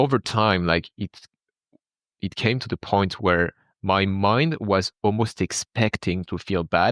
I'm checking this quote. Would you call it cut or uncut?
uncut